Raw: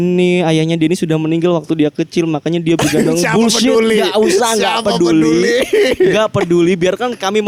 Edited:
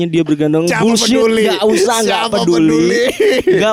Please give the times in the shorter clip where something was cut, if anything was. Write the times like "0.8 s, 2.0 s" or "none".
none

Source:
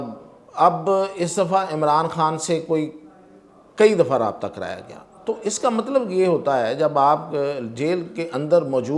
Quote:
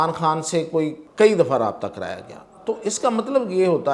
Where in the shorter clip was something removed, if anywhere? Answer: 1.0 s

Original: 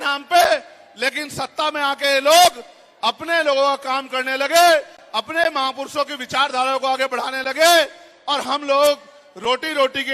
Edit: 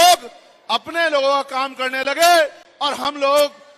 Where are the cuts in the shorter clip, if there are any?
2.6 s

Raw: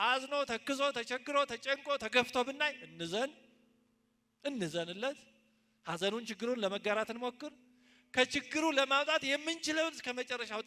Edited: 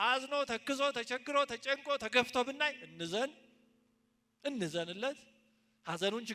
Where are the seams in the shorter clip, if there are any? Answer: none

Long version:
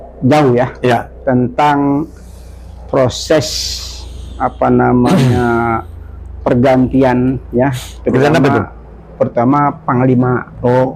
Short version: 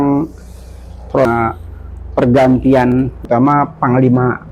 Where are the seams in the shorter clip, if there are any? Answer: 1.1 s, 3.2 s

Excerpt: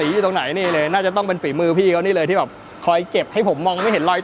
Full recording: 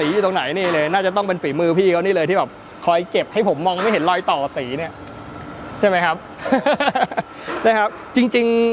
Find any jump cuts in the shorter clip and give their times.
none

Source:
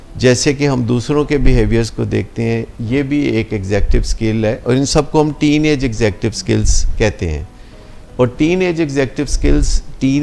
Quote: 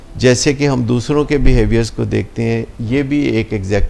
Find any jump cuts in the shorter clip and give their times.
none

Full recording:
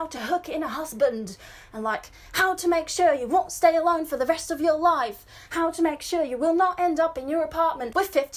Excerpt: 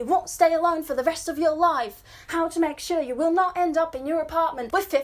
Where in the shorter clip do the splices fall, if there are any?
none

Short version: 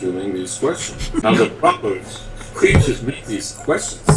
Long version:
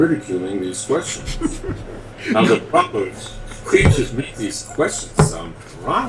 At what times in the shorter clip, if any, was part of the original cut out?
1.2 s

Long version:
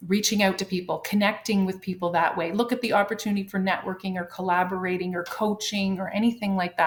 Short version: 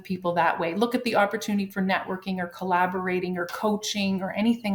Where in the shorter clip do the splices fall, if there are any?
none

